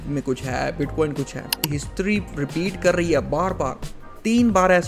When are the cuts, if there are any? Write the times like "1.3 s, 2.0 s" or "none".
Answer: 1.8 s